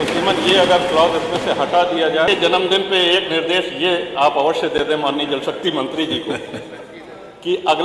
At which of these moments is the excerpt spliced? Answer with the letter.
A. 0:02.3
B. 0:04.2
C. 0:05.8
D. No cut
A